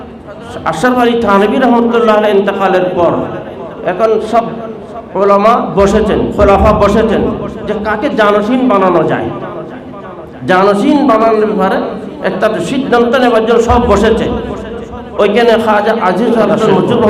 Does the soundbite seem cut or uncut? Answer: uncut